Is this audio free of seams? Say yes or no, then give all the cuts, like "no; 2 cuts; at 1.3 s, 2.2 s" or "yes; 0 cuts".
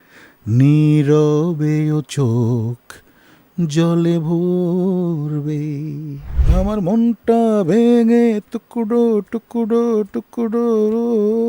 no; 1 cut; at 6.3 s